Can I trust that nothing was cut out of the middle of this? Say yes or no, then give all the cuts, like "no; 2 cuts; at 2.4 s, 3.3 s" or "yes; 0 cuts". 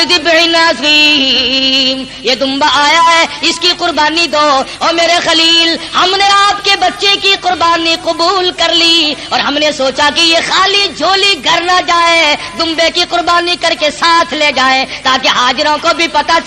yes; 0 cuts